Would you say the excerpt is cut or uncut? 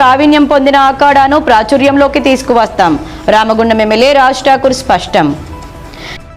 uncut